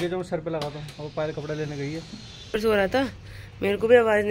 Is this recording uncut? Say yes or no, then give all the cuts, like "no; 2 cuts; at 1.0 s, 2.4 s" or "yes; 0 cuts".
no; 1 cut; at 2.6 s